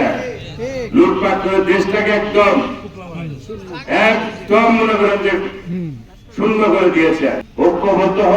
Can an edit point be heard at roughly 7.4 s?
yes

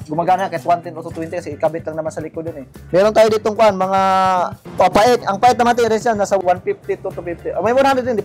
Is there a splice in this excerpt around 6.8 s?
no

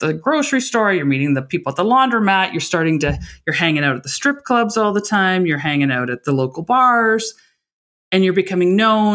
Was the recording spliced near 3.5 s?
no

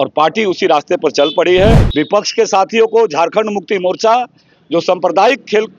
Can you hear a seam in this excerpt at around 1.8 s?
yes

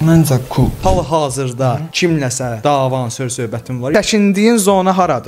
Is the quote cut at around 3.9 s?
yes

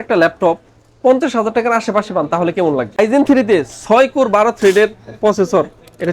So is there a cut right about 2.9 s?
yes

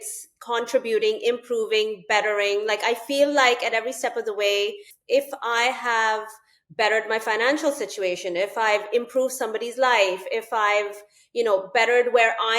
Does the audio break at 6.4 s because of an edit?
no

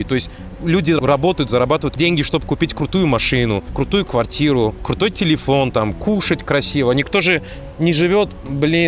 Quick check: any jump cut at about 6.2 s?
no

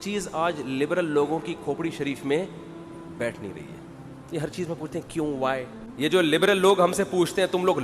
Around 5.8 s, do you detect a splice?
yes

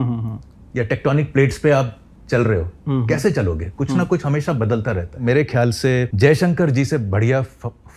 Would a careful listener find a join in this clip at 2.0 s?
no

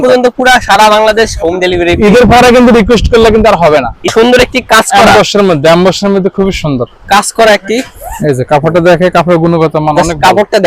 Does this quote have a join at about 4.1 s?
yes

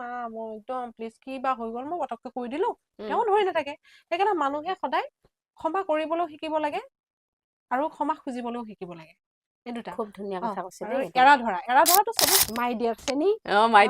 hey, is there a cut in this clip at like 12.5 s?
yes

